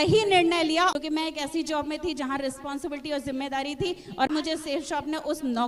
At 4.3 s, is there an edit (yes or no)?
yes